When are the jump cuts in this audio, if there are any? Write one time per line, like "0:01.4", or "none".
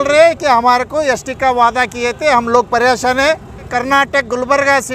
0:03.8